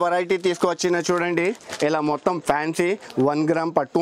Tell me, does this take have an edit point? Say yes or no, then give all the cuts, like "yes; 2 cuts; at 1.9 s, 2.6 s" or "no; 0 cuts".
no; 0 cuts